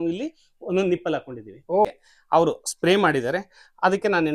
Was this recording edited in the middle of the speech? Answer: yes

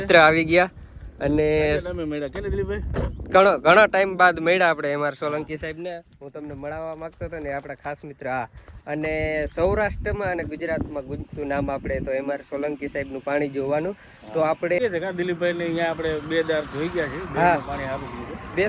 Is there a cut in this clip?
no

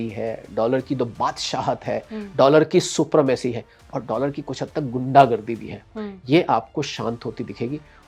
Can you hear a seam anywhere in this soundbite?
no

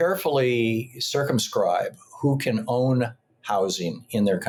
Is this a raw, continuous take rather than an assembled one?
yes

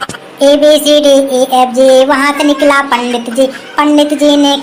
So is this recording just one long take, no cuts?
yes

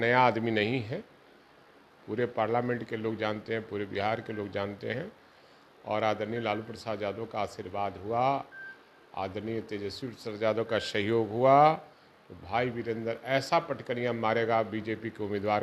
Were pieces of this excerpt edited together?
no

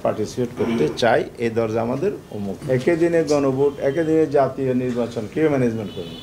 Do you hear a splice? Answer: yes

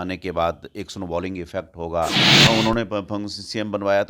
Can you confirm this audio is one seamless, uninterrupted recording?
no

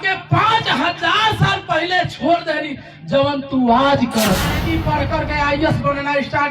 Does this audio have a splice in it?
yes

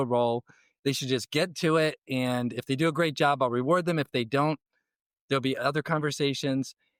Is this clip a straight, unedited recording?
yes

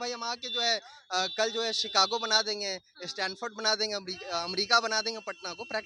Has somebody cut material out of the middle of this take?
no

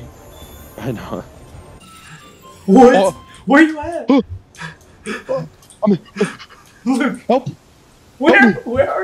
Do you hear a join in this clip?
no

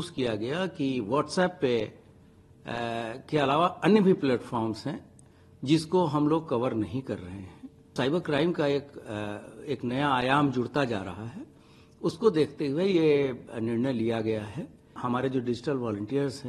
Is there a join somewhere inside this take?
yes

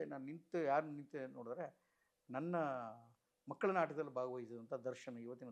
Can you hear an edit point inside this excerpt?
no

